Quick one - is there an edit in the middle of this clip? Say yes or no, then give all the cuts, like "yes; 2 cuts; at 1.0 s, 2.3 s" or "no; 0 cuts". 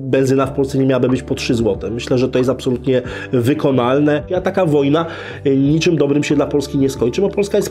yes; 1 cut; at 4.3 s